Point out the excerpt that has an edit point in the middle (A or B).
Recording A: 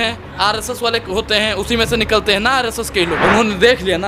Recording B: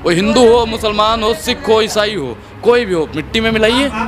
A